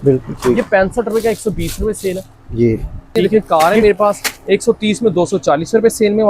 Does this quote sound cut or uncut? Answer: cut